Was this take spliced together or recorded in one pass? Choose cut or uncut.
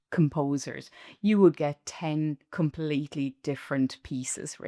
uncut